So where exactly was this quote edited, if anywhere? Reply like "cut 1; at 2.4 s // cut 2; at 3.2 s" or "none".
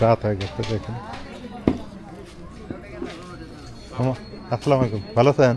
none